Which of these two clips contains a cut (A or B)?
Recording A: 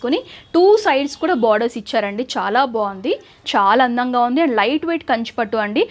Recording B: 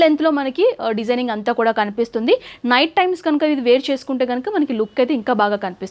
A